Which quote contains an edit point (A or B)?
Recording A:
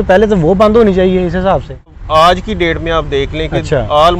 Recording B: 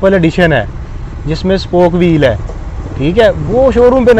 A